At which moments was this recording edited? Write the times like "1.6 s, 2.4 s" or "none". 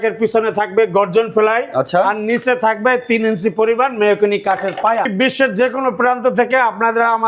5.1 s

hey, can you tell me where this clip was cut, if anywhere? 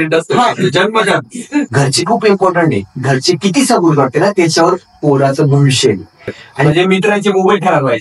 1.7 s, 6.7 s

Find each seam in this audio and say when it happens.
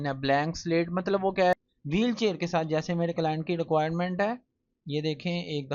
1.5 s

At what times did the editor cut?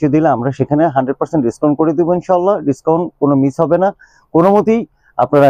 none

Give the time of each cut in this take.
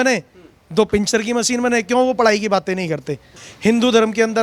3.4 s

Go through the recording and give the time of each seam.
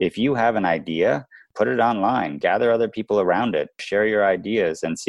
1.4 s, 2.4 s, 3.8 s

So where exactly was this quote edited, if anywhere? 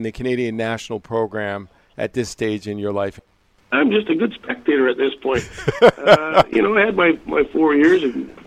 none

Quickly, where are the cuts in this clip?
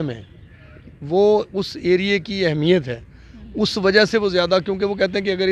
none

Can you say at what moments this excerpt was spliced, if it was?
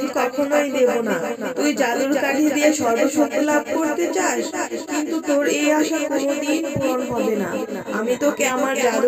none

